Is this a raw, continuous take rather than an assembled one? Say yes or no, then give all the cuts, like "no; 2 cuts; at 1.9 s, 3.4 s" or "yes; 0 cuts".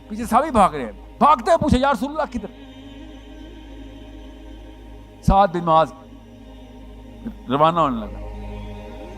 no; 3 cuts; at 2.5 s, 4.6 s, 8.3 s